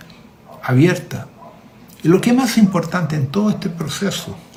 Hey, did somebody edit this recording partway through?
no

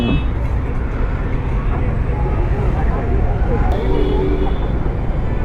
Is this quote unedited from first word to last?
no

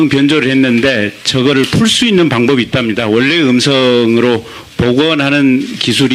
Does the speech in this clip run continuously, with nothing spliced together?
no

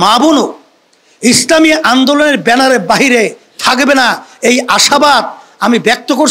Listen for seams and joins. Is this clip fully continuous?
yes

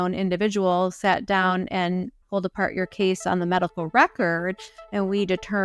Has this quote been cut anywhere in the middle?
yes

